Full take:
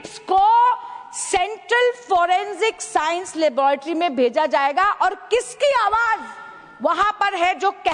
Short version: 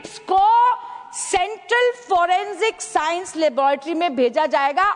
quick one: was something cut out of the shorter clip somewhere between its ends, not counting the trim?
no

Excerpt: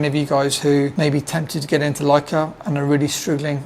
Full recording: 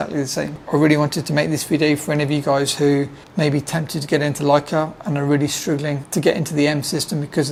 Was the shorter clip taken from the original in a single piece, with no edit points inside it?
no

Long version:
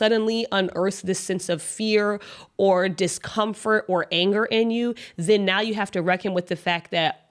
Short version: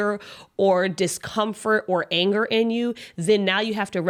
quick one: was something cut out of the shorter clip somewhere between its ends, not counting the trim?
no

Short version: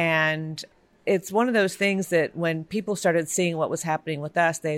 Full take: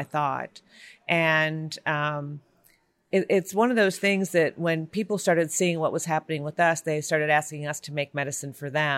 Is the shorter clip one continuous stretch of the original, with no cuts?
no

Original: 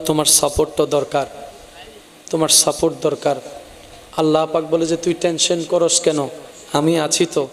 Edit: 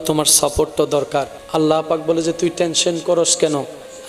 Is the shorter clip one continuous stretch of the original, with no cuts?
no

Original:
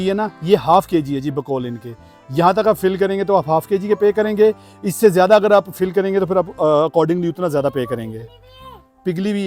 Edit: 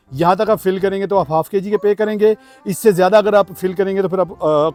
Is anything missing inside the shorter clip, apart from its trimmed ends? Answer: no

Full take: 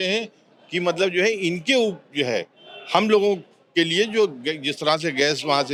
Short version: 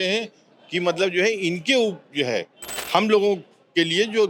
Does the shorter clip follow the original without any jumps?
yes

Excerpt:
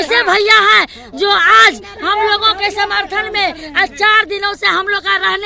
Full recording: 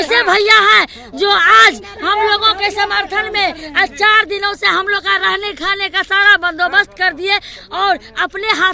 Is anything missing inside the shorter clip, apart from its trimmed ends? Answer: no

